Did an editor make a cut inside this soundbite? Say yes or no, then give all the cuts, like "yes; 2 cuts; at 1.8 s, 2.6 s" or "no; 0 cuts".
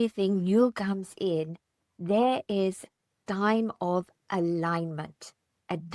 no; 0 cuts